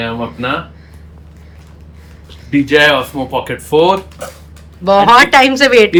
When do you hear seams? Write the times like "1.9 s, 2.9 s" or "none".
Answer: none